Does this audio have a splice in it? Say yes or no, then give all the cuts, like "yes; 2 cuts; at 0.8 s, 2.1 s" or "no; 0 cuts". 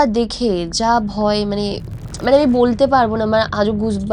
no; 0 cuts